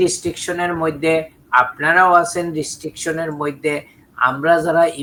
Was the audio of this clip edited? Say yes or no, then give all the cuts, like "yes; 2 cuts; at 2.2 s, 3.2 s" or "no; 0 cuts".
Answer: no; 0 cuts